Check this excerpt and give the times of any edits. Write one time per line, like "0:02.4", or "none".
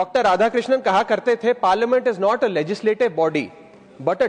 none